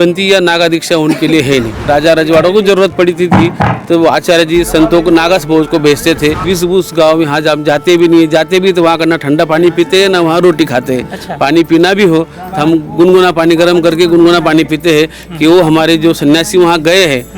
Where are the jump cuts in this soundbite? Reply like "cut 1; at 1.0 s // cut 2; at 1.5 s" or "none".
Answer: cut 1; at 1.8 s // cut 2; at 6.5 s